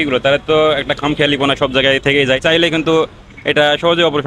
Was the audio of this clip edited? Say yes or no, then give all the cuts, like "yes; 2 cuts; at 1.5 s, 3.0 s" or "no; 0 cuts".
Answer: yes; 1 cut; at 2.4 s